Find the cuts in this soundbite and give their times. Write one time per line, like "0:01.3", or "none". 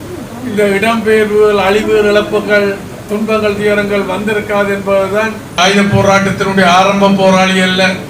0:05.6